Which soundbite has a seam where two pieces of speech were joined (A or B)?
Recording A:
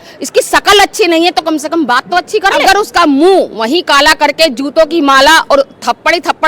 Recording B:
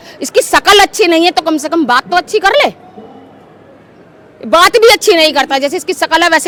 A